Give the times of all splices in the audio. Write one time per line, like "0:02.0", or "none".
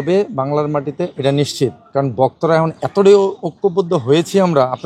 none